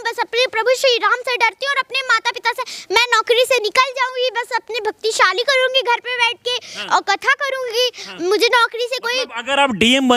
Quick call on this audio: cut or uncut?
uncut